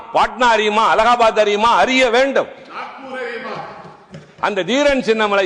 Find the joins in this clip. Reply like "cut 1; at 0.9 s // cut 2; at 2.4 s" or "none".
none